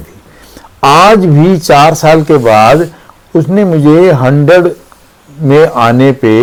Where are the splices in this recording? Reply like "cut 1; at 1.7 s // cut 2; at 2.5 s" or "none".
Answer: none